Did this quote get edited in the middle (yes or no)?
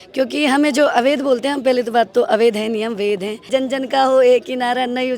yes